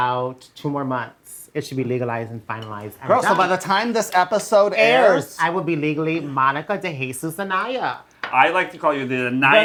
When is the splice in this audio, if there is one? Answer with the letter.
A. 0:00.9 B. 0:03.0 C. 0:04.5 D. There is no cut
D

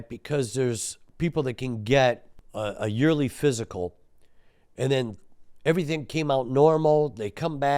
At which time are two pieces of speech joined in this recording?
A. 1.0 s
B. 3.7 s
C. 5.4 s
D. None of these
A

